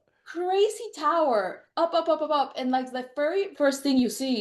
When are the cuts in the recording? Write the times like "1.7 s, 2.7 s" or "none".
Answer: 3.5 s

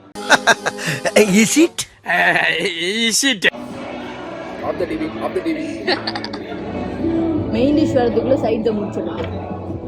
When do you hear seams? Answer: none

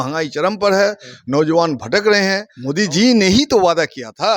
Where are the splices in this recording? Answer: 2.5 s

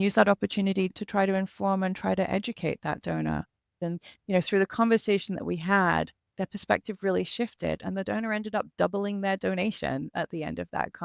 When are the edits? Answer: 3.9 s

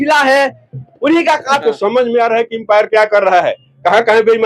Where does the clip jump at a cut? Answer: 1.6 s

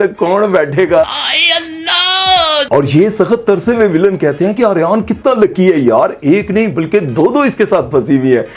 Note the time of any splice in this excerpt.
2.7 s

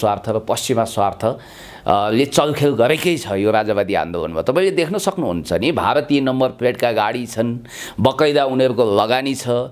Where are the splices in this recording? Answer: none

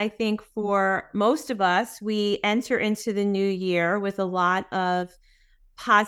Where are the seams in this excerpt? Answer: none

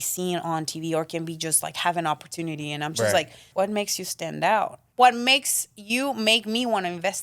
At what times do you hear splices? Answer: 3.5 s, 4.8 s

